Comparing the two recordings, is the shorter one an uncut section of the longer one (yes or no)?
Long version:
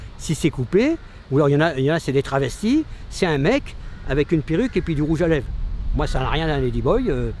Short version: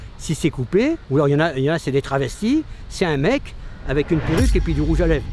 no